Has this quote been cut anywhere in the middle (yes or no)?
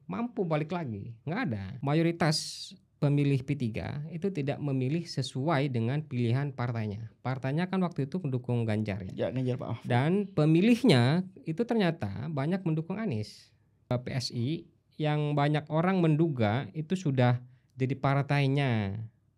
yes